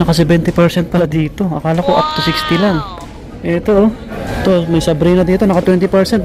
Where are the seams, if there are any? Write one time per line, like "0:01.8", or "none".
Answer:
0:04.1